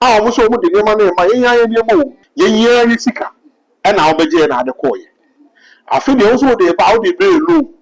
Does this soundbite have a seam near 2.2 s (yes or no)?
yes